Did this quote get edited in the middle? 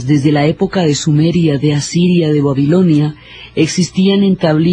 no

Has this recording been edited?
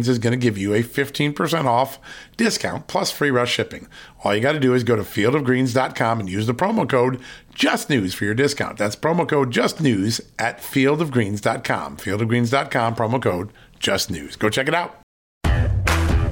yes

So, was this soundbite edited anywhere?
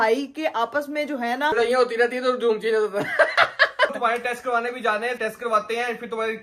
yes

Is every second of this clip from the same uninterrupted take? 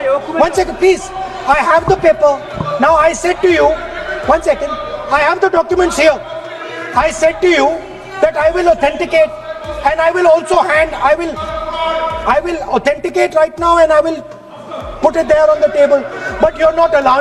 yes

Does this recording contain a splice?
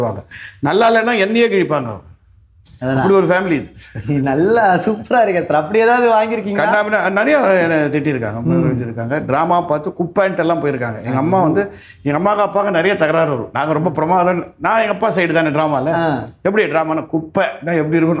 no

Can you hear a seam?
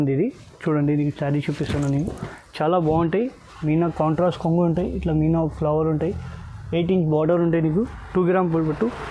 no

